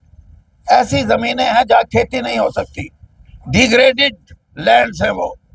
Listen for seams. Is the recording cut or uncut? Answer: uncut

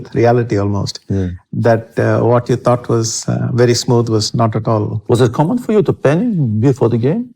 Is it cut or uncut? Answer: uncut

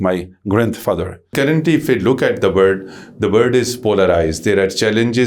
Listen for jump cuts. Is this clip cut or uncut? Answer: cut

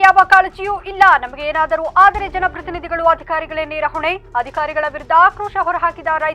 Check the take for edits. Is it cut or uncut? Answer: uncut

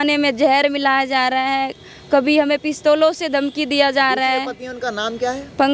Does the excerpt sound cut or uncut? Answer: uncut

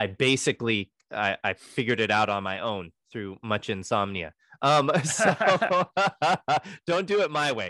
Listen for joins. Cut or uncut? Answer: uncut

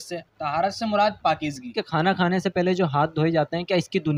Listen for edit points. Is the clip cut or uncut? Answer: uncut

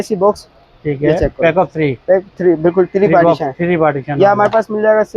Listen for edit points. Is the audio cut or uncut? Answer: uncut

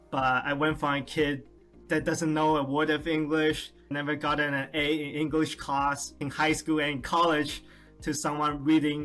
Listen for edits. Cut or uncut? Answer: uncut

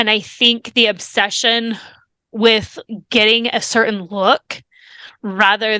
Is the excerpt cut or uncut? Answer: uncut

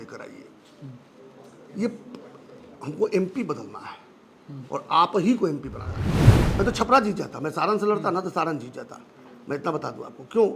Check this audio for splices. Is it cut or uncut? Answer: cut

